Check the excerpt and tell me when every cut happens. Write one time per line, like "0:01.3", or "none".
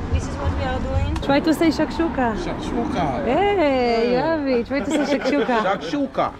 0:01.2